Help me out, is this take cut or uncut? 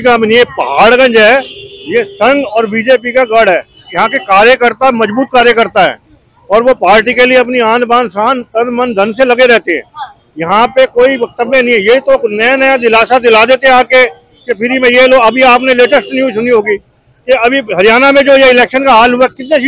uncut